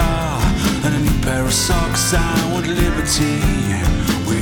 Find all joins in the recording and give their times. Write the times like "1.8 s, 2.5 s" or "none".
none